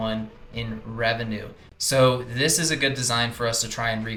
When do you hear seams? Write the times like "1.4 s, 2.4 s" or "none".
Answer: none